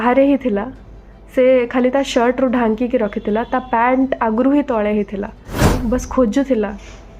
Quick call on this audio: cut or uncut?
cut